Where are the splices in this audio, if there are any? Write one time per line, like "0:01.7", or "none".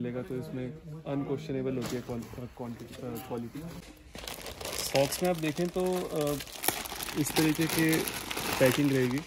none